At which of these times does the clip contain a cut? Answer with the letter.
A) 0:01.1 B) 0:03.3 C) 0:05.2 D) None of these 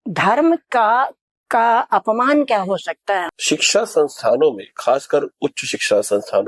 B